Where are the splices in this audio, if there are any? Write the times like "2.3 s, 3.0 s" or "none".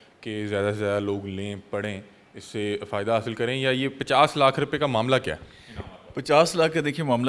none